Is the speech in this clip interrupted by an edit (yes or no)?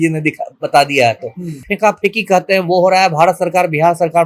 yes